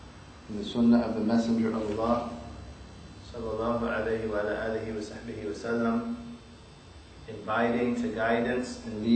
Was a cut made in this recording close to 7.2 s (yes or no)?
no